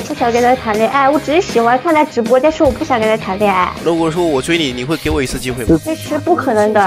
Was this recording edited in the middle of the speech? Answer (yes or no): yes